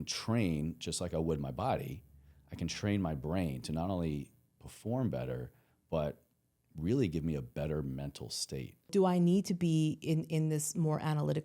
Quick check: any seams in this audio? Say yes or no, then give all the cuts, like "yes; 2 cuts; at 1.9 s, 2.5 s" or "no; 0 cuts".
yes; 1 cut; at 8.9 s